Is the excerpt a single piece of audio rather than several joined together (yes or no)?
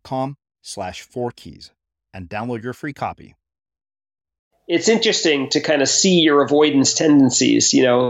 no